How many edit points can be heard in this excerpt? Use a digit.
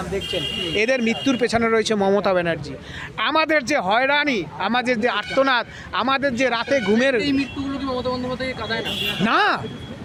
0